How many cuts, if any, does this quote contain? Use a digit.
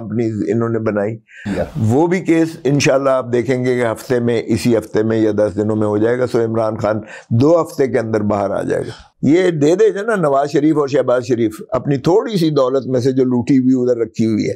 2